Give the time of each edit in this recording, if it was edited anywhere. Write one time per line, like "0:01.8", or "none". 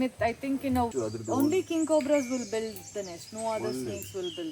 0:00.9